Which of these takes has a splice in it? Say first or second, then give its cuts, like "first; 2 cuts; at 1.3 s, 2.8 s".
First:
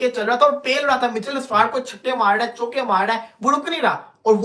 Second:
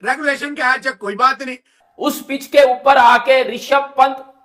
second; 1 cut; at 1.9 s